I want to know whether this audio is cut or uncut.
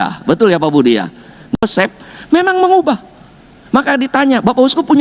cut